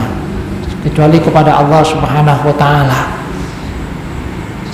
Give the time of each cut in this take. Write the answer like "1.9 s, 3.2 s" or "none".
none